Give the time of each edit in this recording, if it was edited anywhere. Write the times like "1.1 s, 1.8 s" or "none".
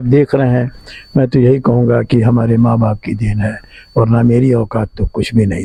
none